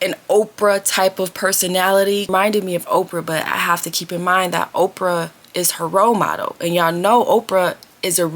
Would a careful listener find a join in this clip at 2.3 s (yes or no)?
yes